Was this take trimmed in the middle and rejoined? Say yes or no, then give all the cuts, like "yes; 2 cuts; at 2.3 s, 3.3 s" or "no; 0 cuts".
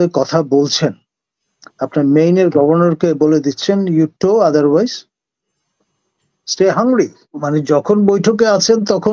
yes; 1 cut; at 7.3 s